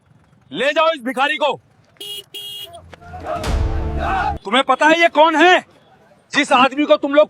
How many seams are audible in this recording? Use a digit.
1